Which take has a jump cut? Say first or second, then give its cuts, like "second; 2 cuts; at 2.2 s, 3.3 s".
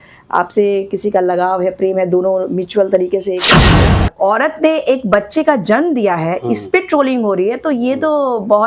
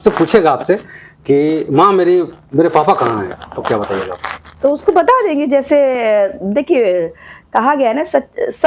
first; 1 cut; at 3.7 s